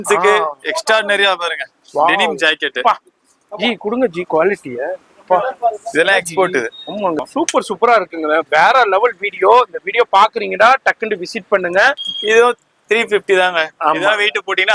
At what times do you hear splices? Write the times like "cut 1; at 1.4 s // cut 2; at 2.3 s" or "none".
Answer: cut 1; at 7.2 s // cut 2; at 12.1 s